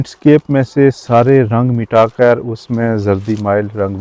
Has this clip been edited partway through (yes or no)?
no